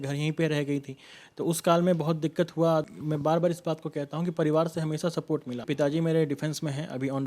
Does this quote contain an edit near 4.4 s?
no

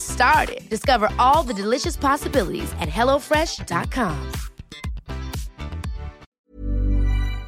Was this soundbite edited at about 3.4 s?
no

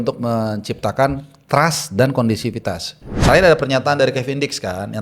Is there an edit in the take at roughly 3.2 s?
yes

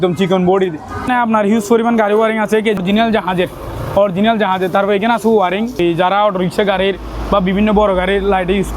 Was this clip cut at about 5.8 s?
yes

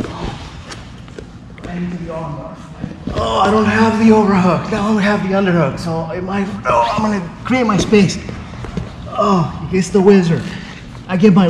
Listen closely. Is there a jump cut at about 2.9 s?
yes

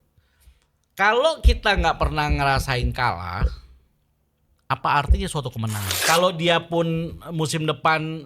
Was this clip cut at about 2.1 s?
no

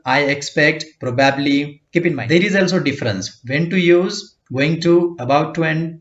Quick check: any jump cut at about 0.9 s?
no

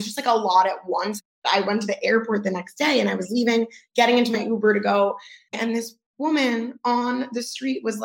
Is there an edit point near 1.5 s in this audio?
yes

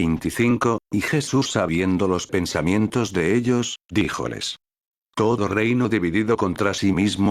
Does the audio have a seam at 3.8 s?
yes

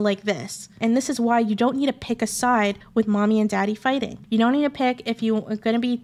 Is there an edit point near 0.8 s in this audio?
yes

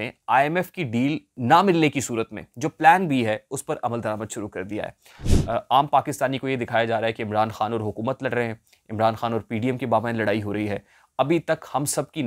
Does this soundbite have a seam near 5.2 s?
yes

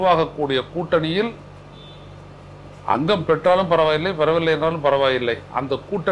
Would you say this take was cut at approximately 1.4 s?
no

